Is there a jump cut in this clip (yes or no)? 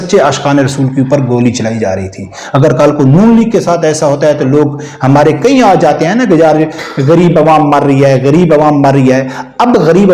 no